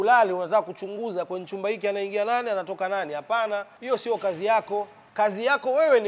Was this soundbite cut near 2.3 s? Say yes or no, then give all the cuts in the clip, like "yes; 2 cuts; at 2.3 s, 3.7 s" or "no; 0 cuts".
no; 2 cuts; at 3.7 s, 5.0 s